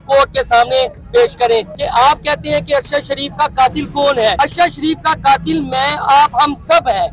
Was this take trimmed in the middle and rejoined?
yes; 2 cuts; at 1.7 s, 4.3 s

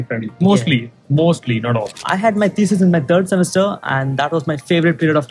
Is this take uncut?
no; 1 cut; at 2.0 s

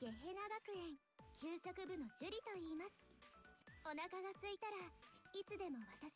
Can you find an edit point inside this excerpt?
no; 0 cuts

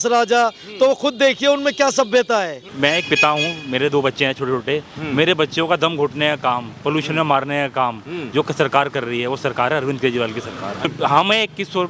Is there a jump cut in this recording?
yes; 2 cuts; at 2.6 s, 10.9 s

